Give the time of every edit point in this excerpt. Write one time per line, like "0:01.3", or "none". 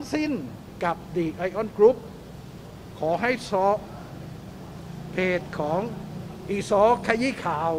none